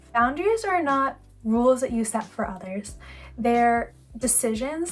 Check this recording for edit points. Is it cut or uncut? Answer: uncut